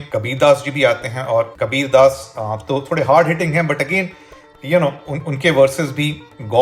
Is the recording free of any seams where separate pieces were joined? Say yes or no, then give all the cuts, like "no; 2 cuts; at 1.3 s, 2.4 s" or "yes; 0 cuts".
yes; 0 cuts